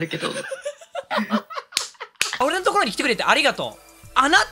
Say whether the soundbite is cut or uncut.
cut